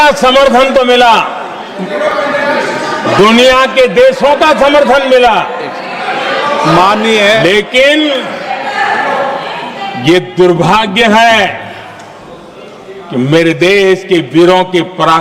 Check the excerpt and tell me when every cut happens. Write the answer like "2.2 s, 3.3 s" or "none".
none